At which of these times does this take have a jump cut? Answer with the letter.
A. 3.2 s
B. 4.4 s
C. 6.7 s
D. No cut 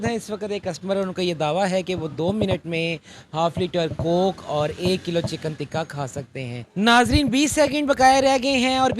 C